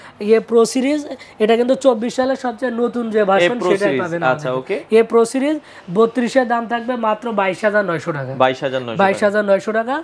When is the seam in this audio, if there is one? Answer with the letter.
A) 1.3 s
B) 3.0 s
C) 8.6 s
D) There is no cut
D